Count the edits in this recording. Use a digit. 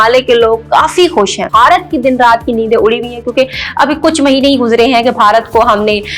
1